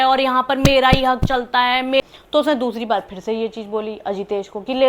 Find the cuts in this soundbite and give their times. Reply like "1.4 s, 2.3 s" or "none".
2.0 s